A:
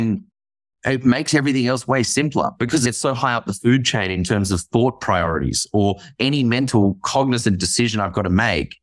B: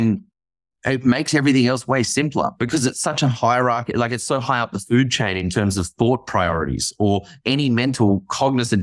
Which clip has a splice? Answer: A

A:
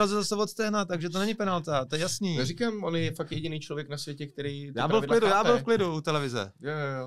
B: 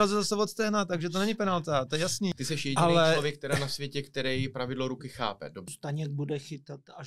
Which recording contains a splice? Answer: B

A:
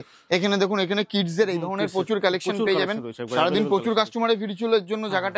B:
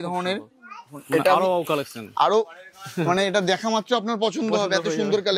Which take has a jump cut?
B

